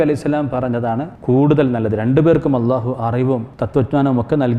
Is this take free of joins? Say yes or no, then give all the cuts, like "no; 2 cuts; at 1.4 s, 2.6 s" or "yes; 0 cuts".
no; 2 cuts; at 1.1 s, 3.6 s